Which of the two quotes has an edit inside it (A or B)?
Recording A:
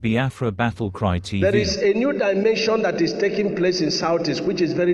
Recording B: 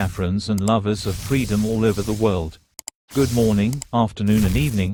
A